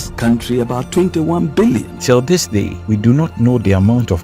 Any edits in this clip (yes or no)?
yes